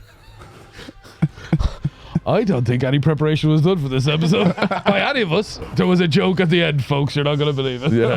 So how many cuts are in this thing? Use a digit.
1